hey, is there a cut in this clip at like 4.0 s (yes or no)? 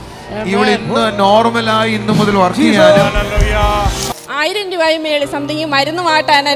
yes